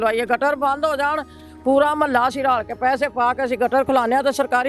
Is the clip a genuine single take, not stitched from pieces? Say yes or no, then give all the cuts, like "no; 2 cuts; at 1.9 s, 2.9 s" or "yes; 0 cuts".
yes; 0 cuts